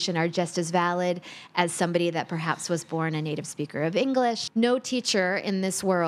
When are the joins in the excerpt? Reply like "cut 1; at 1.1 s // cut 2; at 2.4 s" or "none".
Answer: cut 1; at 4.4 s